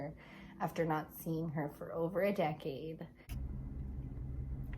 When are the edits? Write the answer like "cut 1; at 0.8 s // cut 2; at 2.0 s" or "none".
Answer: cut 1; at 3.4 s